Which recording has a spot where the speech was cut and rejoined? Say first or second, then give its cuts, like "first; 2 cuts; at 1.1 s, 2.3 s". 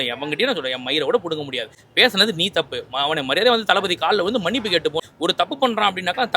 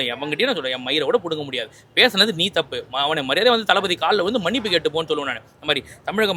first; 1 cut; at 5.0 s